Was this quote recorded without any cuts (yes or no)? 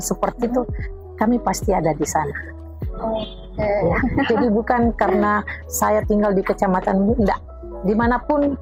yes